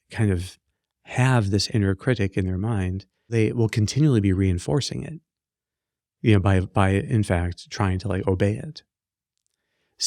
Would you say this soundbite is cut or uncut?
cut